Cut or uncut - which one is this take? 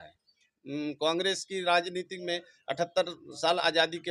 uncut